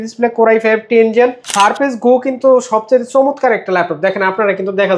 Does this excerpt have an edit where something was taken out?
yes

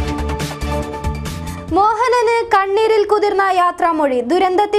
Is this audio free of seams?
no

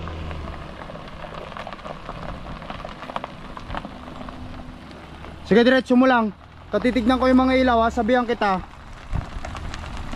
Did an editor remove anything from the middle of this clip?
no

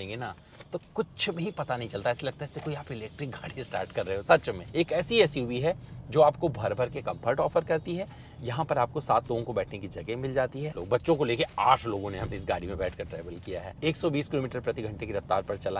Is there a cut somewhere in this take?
yes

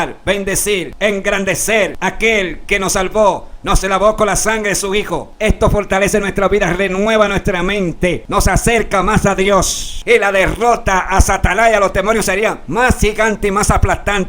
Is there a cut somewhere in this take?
yes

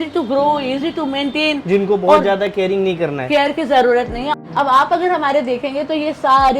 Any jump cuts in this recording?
yes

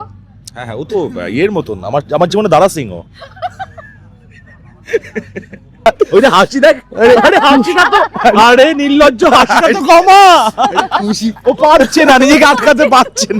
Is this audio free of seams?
no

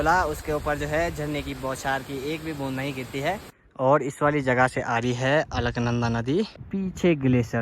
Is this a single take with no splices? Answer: no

